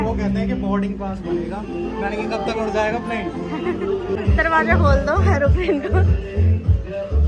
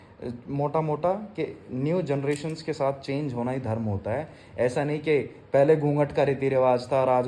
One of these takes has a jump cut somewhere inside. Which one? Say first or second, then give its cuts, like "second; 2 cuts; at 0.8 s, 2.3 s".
first; 1 cut; at 4.2 s